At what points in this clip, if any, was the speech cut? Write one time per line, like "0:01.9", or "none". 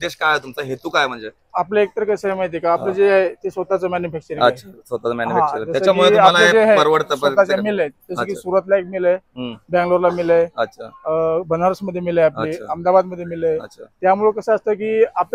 none